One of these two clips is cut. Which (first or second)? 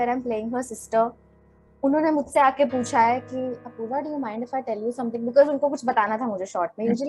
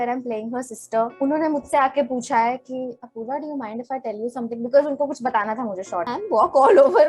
second